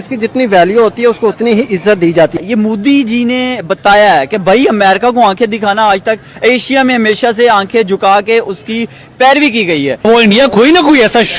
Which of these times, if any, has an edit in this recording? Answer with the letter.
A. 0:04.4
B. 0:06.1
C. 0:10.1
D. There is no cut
C